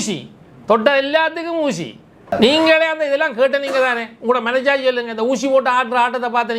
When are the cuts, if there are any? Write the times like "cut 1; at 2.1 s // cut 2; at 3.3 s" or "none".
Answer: cut 1; at 2.3 s